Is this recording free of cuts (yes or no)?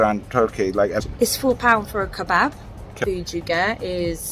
no